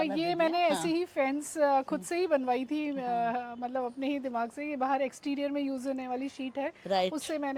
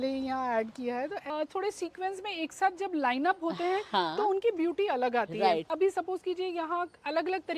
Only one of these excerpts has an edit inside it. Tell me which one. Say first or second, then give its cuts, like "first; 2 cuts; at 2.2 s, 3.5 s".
second; 2 cuts; at 1.3 s, 5.7 s